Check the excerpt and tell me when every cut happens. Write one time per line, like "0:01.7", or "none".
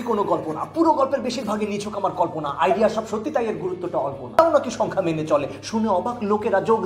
0:04.4